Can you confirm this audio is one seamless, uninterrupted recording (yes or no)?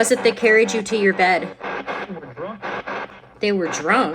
no